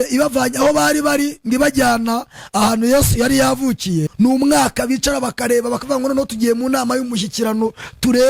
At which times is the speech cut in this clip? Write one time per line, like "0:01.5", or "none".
0:04.1